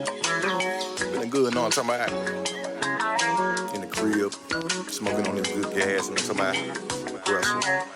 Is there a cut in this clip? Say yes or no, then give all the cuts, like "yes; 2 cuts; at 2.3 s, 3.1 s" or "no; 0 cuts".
no; 0 cuts